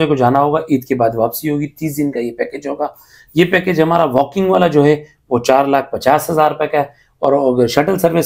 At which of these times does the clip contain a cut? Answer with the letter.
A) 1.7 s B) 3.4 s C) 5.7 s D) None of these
D